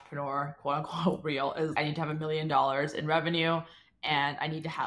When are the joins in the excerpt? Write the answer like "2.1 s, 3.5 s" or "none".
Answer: 1.7 s